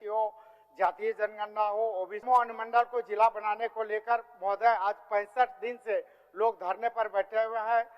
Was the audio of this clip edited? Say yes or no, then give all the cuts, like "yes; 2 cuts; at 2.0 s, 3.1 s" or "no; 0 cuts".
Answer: yes; 1 cut; at 2.2 s